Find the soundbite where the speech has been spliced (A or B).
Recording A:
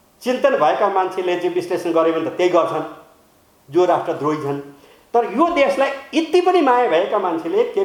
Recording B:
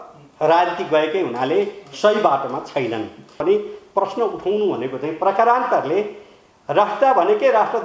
B